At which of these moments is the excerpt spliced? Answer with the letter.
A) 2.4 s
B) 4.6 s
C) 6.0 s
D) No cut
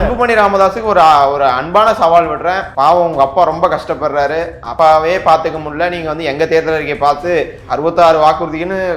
B